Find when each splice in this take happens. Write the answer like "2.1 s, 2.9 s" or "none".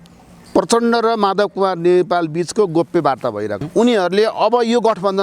3.6 s